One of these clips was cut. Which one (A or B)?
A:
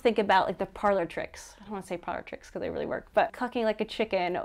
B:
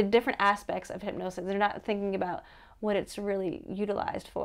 A